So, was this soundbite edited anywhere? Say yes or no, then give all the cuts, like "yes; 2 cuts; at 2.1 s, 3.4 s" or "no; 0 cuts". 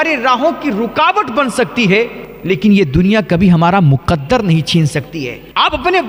yes; 1 cut; at 2.3 s